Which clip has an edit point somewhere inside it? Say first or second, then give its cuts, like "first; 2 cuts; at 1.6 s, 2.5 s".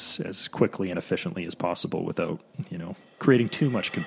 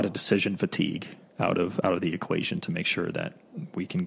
first; 1 cut; at 3.0 s